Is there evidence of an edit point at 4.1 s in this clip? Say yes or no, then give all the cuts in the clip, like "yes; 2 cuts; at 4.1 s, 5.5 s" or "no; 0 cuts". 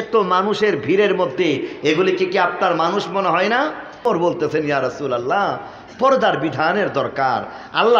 yes; 1 cut; at 4.1 s